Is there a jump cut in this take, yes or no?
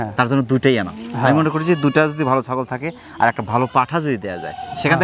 no